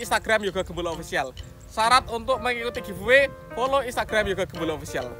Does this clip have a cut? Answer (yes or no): no